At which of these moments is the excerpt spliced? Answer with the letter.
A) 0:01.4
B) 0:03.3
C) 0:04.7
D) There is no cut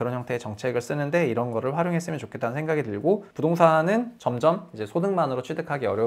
B